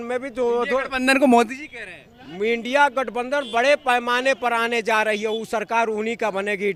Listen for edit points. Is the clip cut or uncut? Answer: uncut